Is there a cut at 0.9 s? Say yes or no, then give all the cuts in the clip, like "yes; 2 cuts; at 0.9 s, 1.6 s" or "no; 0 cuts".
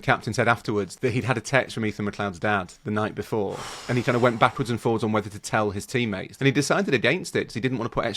yes; 2 cuts; at 0.9 s, 6.3 s